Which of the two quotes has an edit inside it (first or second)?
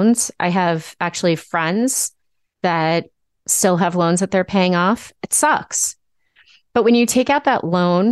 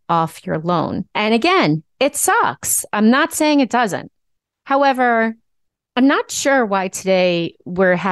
second